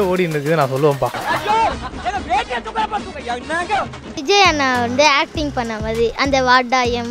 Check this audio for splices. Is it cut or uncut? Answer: cut